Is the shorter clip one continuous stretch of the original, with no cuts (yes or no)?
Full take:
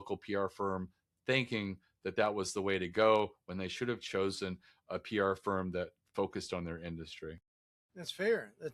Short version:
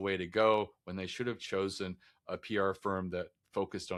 yes